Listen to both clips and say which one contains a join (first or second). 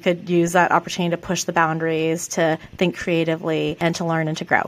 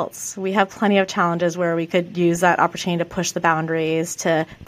first